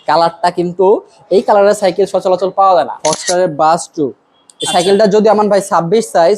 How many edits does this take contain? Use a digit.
1